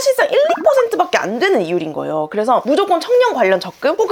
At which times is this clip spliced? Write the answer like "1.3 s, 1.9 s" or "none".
none

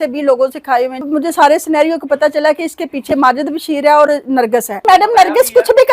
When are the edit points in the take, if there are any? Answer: 1.0 s, 4.8 s

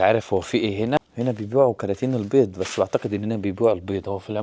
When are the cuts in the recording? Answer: 1.0 s

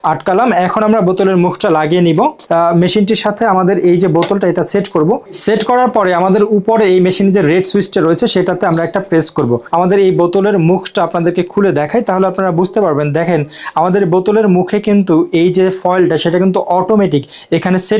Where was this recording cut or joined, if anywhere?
2.4 s, 9.6 s

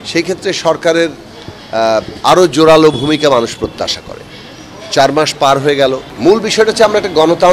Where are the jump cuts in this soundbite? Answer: 6.1 s

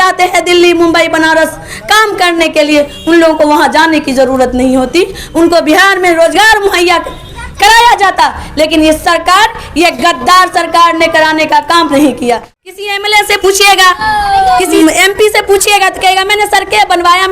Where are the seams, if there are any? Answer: 12.8 s, 14.8 s

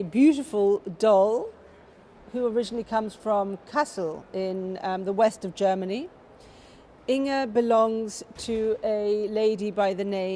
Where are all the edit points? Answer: none

